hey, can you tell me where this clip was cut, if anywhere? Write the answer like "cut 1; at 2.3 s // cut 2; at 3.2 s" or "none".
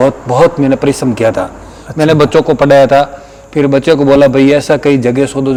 none